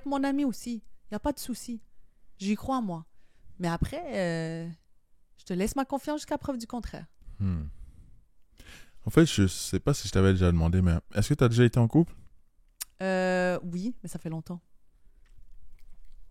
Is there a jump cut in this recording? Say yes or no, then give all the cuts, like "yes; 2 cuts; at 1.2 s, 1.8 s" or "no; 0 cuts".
no; 0 cuts